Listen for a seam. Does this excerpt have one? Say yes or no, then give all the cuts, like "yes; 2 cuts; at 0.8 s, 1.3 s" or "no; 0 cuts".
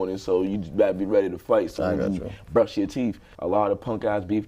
yes; 1 cut; at 3.3 s